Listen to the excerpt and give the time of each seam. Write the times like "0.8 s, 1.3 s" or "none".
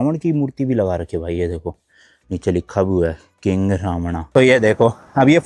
4.3 s